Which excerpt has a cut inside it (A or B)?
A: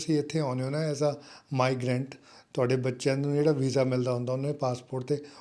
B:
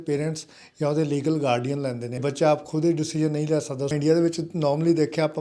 B